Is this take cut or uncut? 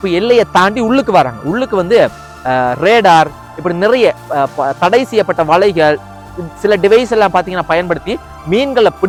uncut